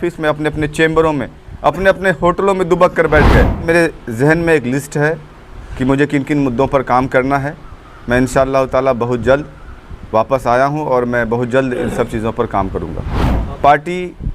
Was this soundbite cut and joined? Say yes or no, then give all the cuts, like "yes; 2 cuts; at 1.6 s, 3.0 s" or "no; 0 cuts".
yes; 2 cuts; at 3.6 s, 13.3 s